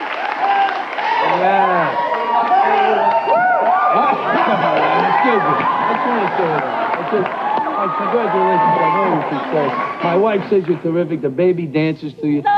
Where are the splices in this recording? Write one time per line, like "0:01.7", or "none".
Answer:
0:04.3